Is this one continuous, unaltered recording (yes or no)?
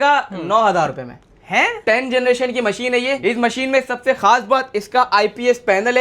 no